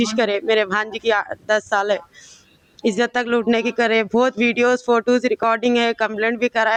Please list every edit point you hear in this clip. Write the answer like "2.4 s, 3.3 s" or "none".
none